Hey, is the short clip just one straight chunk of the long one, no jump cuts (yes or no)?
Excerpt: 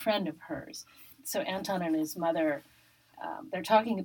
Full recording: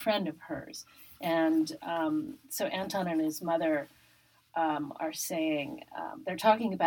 no